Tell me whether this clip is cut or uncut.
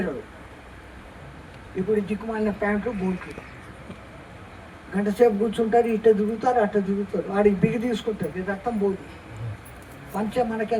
uncut